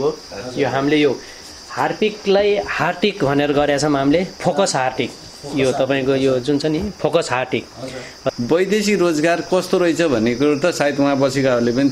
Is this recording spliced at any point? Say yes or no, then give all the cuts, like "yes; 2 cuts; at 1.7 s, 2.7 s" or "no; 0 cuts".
yes; 1 cut; at 8.2 s